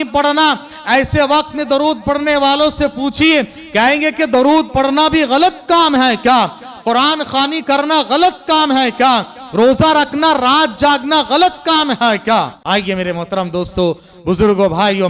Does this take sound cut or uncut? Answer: cut